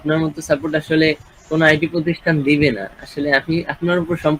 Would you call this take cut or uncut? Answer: uncut